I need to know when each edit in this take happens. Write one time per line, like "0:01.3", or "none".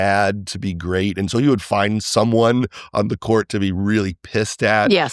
none